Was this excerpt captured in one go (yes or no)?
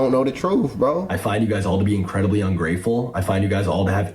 no